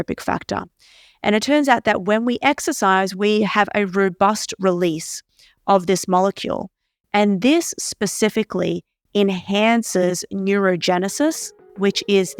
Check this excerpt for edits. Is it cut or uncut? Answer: uncut